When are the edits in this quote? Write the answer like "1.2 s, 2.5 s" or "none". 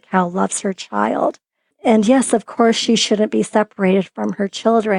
1.7 s